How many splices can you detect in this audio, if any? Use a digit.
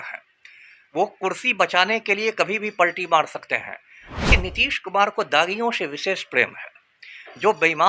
1